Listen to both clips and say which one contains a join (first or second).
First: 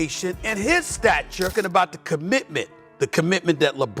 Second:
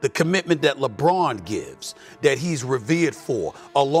first